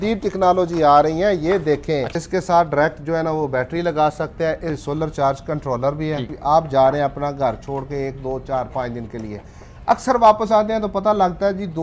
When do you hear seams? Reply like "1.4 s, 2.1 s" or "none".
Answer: 2.1 s, 4.9 s, 6.3 s